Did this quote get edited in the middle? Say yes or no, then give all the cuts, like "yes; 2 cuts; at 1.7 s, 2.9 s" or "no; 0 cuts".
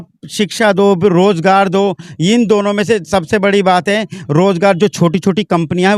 no; 0 cuts